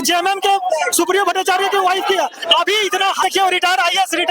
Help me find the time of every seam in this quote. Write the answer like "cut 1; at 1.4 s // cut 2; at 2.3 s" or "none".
cut 1; at 3.2 s